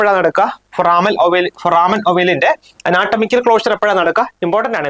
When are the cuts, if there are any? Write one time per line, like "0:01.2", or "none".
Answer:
none